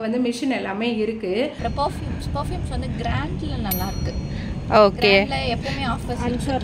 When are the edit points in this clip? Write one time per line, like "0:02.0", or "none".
0:01.6

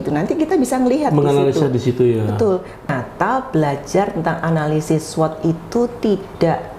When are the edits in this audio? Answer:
0:02.9

